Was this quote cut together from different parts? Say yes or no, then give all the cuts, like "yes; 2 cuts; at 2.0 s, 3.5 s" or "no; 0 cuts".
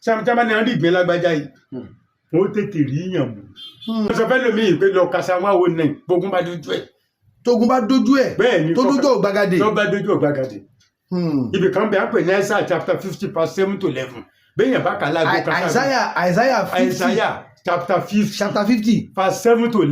yes; 1 cut; at 4.1 s